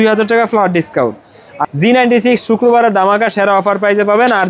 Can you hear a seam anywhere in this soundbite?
yes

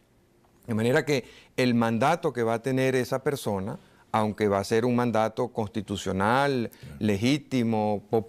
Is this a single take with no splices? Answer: no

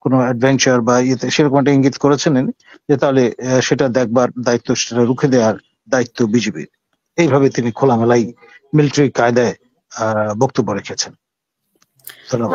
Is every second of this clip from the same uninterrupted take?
yes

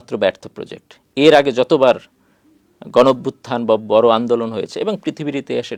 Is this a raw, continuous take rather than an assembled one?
yes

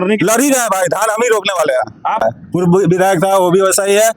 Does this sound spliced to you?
yes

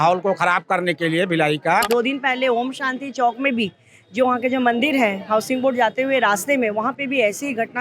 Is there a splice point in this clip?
yes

